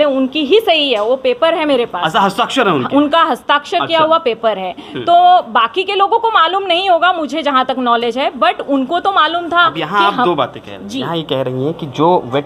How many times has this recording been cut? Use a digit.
0